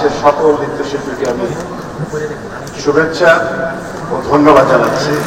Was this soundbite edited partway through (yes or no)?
no